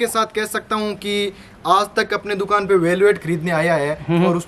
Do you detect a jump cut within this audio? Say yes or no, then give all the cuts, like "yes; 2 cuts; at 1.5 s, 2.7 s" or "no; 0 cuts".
no; 0 cuts